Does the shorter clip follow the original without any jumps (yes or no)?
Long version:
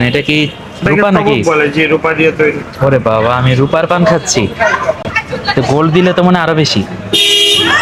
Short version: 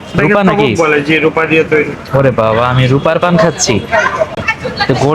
yes